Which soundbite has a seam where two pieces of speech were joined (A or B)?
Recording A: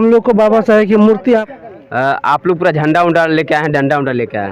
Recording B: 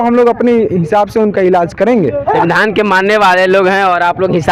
A